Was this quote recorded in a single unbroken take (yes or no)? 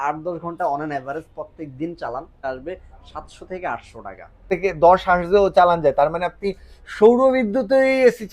no